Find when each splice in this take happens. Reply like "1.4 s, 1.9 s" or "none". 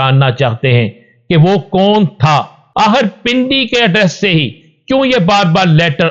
2.6 s